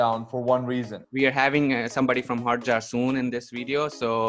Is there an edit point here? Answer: yes; 1 cut; at 1.0 s

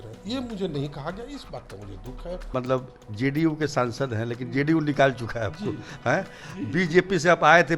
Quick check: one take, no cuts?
no; 1 cut; at 2.5 s

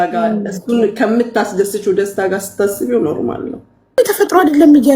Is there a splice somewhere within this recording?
yes; 1 cut; at 3.9 s

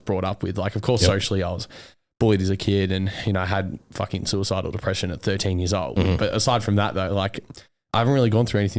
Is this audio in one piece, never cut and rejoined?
yes; 0 cuts

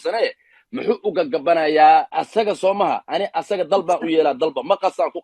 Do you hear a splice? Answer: yes; 1 cut; at 2.1 s

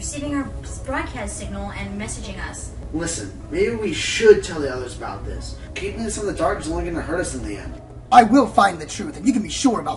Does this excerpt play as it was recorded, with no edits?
yes; 0 cuts

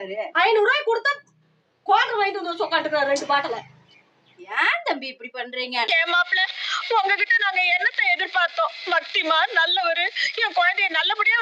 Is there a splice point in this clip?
no; 0 cuts

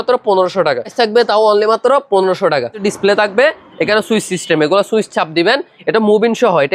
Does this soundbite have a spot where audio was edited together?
yes; 2 cuts; at 0.9 s, 2.8 s

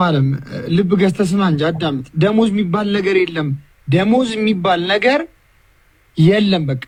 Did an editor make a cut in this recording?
no; 0 cuts

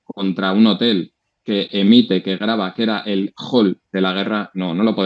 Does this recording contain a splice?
no; 0 cuts

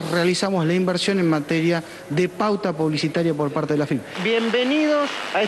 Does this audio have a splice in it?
yes; 1 cut; at 4.1 s

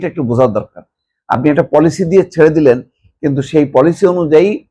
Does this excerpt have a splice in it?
no; 0 cuts

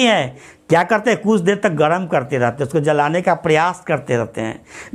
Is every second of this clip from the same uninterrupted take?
yes; 0 cuts

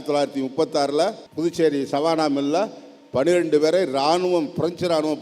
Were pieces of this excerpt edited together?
yes; 1 cut; at 1.2 s

